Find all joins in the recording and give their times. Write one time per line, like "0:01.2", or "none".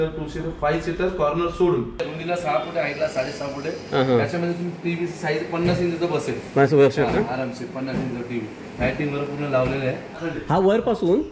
0:02.0
0:10.1